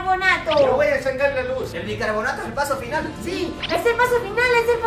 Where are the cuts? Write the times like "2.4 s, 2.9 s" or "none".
none